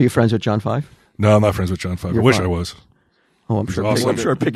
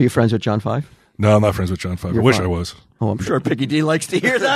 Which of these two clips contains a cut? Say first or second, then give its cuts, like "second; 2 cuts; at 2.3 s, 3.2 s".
second; 1 cut; at 3.2 s